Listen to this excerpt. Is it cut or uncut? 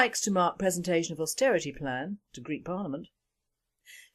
uncut